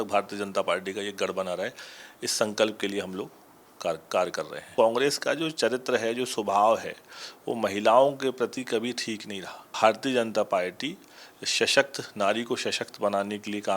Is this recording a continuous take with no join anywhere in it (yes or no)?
no